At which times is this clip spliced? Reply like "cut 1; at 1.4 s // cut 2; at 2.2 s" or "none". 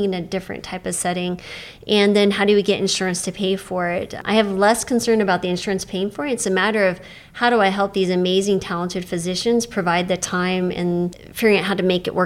cut 1; at 4.2 s // cut 2; at 11.2 s